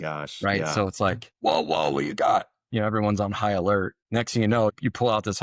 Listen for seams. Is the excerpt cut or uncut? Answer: cut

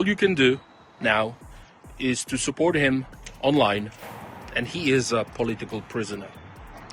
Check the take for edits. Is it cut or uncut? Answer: cut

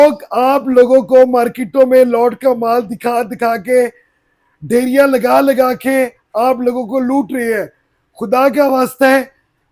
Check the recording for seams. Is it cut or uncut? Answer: uncut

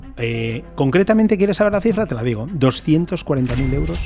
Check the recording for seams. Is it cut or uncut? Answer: uncut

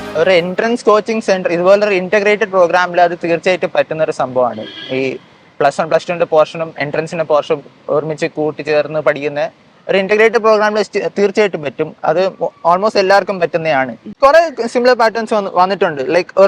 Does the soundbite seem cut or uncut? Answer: cut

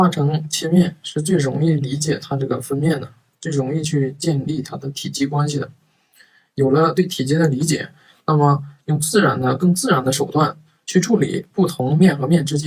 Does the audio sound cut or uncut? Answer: uncut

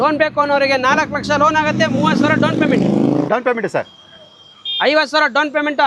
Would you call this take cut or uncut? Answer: cut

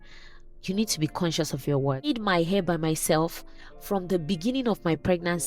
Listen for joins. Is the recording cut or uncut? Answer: cut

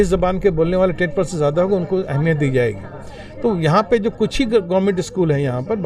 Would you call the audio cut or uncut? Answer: uncut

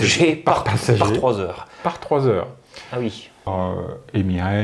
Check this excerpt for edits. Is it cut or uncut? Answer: cut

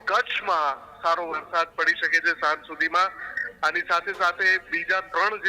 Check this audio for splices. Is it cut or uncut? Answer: uncut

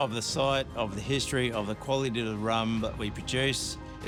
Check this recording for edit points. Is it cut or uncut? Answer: uncut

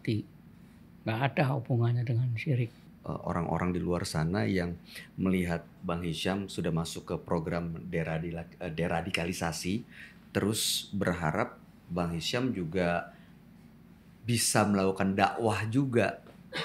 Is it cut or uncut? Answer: cut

